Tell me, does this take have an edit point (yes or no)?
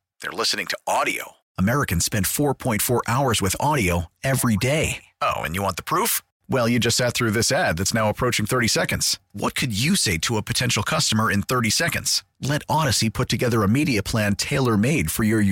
no